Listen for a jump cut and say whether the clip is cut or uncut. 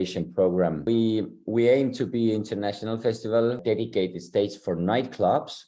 cut